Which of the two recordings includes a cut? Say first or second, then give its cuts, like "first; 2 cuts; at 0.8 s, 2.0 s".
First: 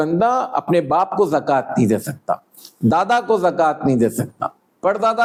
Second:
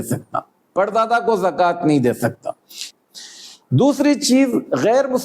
second; 1 cut; at 2.8 s